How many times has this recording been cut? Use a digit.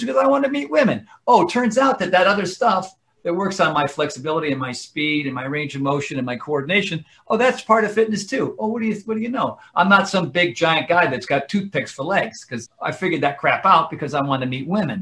0